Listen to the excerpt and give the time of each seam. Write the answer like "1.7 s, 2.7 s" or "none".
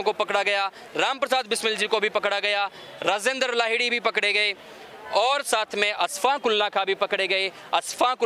none